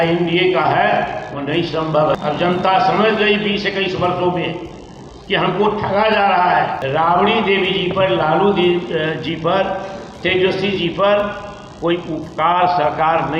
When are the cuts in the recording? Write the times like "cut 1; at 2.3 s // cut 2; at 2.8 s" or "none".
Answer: cut 1; at 2.1 s // cut 2; at 6.8 s